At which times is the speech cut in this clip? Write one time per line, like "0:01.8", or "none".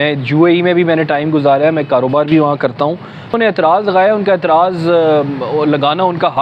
0:03.4